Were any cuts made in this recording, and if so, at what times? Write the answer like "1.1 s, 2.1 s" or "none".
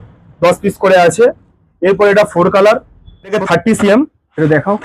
3.4 s